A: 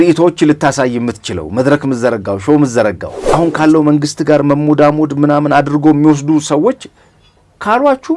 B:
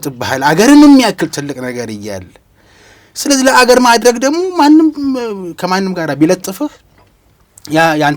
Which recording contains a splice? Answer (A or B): A